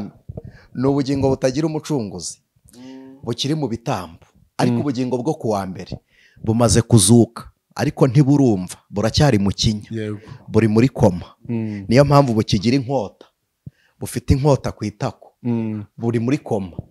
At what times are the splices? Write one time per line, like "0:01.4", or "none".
none